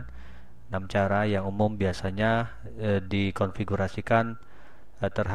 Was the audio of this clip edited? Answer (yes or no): no